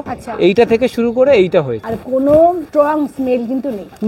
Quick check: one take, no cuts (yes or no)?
no